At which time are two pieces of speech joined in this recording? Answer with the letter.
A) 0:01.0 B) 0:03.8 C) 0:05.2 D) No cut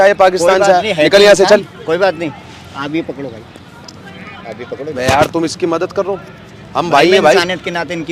D